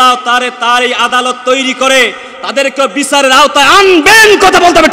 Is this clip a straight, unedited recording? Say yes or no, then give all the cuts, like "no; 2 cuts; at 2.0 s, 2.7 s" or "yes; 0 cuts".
yes; 0 cuts